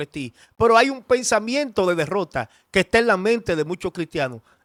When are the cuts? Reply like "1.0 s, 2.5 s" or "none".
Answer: none